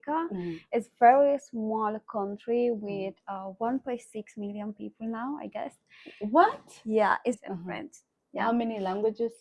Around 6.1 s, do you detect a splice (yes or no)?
no